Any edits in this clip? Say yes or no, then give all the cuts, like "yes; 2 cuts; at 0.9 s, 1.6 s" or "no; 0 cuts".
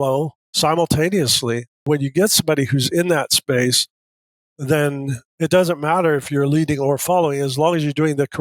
yes; 1 cut; at 1.8 s